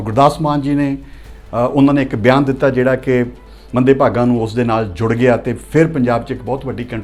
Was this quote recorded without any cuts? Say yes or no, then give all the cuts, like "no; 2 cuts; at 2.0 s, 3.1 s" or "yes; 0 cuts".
yes; 0 cuts